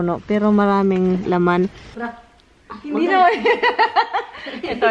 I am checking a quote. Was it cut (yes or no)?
yes